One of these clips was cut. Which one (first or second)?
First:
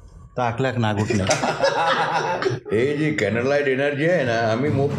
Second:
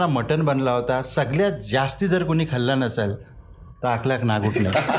first